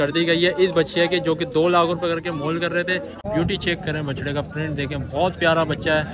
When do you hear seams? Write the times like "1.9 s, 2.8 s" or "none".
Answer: 3.2 s